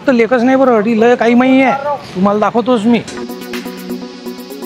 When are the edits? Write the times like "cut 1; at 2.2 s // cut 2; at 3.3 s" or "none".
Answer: none